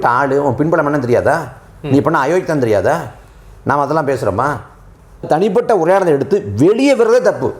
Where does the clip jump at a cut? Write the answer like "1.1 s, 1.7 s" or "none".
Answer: 5.3 s